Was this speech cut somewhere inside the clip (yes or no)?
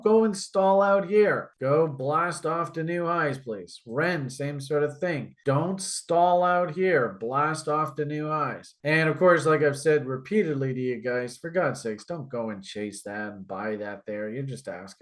no